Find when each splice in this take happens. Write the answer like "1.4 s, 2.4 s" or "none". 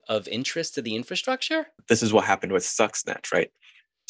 1.8 s